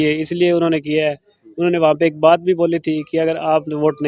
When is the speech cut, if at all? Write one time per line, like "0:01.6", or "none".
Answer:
none